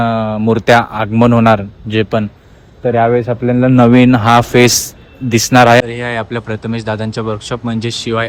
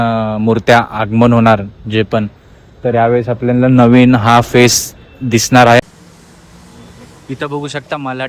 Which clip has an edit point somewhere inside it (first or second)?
second